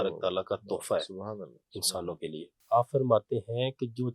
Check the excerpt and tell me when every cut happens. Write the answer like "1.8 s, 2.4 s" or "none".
2.5 s